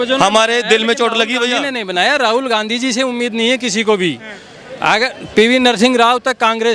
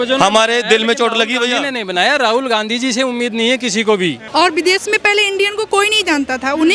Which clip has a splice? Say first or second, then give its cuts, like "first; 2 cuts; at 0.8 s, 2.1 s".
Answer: second; 1 cut; at 4.2 s